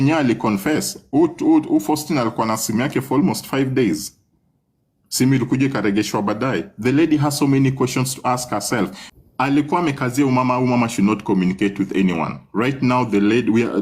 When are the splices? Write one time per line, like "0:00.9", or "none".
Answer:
0:09.0